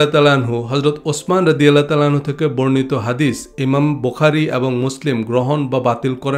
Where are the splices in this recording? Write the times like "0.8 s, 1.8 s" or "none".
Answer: none